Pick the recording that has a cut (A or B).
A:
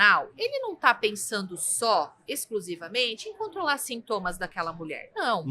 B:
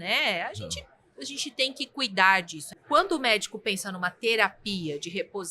B